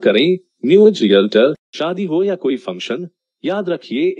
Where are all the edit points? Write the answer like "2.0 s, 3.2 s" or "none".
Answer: 1.7 s